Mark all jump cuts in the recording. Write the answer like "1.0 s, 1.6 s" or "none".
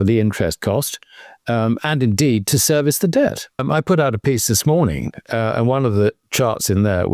3.6 s, 6.2 s